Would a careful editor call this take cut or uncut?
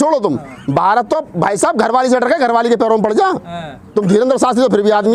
uncut